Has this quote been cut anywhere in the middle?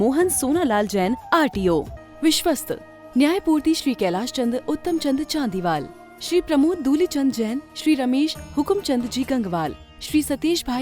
yes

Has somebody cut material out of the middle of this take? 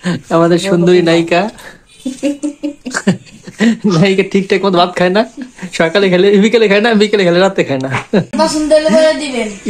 yes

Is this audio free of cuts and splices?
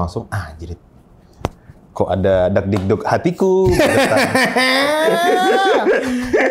yes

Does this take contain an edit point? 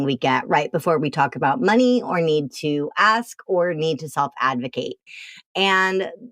no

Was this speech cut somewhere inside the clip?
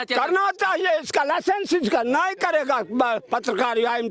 no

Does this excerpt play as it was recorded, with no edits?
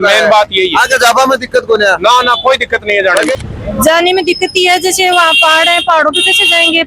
no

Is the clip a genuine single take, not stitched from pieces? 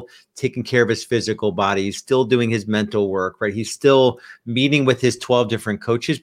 yes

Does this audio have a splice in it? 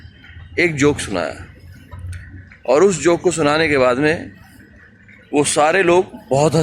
no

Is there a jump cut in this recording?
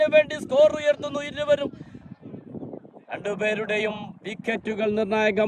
no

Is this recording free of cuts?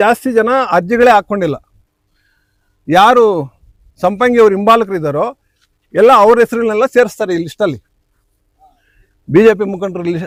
yes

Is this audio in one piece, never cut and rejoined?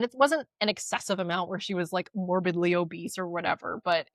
yes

